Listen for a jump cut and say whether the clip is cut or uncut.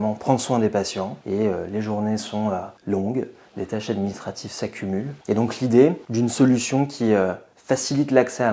cut